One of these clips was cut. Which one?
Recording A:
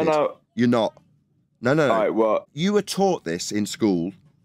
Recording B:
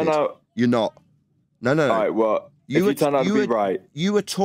A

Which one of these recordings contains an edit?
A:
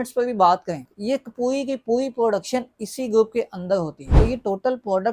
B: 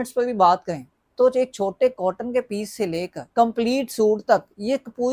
A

